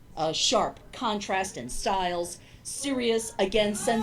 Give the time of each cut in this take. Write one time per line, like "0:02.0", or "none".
0:01.0